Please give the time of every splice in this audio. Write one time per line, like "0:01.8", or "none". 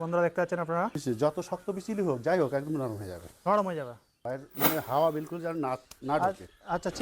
0:01.2
0:04.2